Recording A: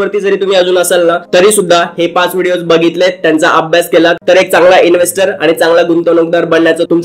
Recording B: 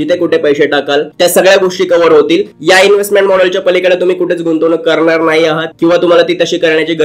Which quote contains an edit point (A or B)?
A